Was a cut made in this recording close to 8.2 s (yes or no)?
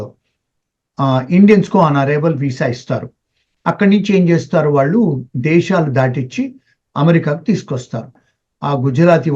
yes